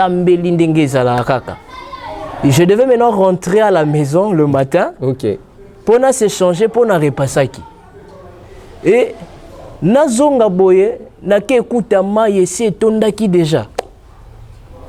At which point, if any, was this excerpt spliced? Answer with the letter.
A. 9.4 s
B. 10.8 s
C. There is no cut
C